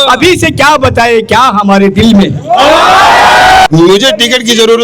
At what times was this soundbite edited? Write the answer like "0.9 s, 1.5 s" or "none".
3.7 s